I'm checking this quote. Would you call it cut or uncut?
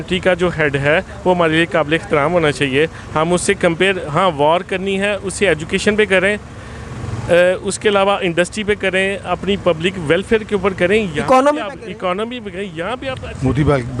cut